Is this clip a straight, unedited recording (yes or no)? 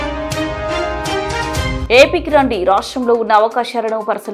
yes